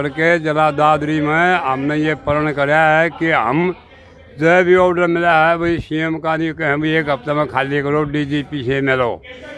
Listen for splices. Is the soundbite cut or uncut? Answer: uncut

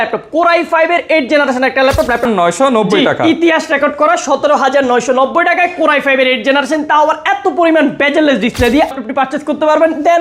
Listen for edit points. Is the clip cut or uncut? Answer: cut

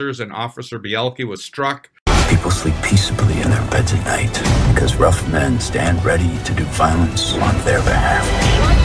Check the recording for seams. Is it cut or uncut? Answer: cut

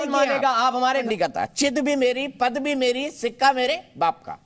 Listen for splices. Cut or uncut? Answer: cut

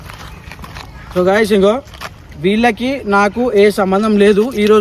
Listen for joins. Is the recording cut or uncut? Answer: cut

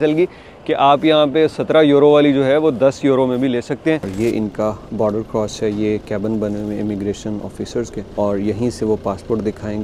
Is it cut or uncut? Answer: cut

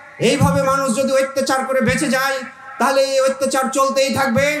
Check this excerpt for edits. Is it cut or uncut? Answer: uncut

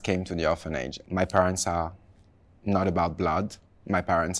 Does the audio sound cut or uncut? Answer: cut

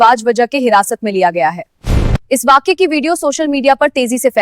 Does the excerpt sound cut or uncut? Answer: cut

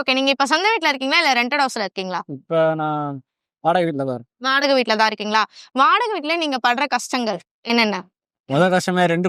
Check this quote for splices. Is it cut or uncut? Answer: uncut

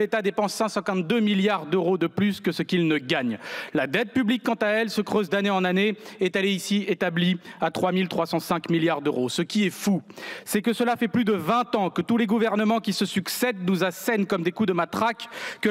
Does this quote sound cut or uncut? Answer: uncut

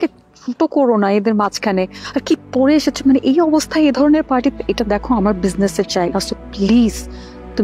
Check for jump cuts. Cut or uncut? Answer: uncut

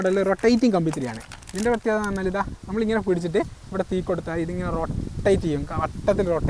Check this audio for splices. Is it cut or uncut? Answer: uncut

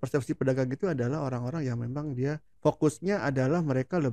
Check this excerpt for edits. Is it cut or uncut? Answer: cut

